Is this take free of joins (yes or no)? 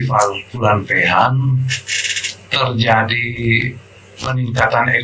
yes